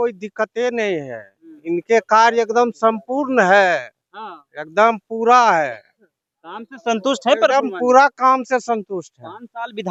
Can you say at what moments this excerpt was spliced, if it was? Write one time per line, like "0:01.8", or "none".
none